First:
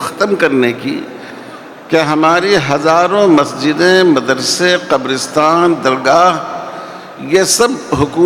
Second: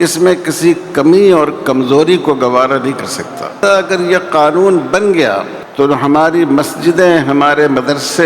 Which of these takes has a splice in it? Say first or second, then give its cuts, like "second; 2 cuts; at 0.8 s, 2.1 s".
second; 2 cuts; at 3.5 s, 5.6 s